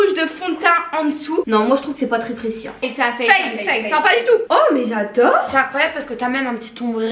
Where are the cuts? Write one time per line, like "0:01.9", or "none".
0:01.4
0:04.5